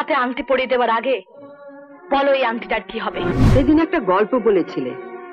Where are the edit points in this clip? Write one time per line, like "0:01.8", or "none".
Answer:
0:03.3